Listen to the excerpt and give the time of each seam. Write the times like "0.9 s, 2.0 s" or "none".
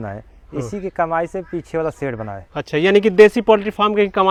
none